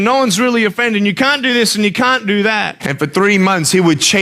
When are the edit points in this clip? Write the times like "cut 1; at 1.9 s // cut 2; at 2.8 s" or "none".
cut 1; at 2.8 s